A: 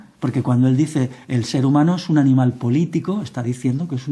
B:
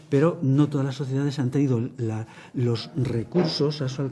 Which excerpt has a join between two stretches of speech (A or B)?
B